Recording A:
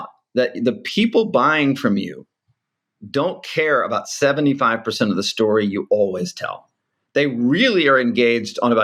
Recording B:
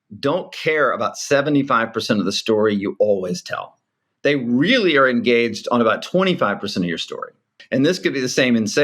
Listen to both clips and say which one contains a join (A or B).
B